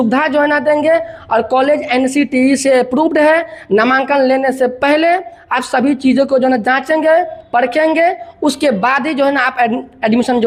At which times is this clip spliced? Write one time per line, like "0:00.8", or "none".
none